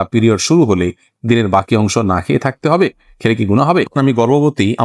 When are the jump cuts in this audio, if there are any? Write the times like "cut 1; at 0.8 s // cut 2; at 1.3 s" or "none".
cut 1; at 3.9 s